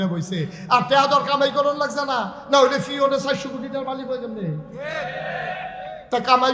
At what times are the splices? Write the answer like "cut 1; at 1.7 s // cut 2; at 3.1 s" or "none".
none